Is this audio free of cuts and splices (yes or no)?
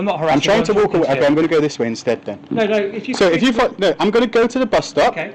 yes